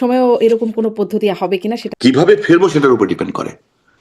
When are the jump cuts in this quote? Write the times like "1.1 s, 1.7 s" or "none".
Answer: 1.9 s